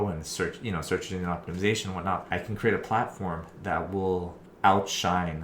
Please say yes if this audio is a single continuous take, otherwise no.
no